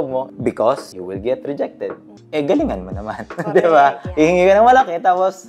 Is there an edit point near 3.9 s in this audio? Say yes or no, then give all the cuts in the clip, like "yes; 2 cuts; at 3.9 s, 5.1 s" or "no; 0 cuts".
no; 2 cuts; at 0.9 s, 2.1 s